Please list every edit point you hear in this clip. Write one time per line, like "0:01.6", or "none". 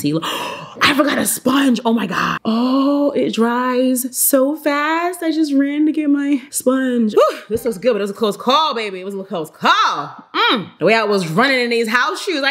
0:02.4
0:07.1